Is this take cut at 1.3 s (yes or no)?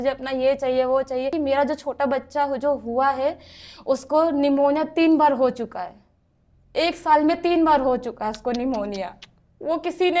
yes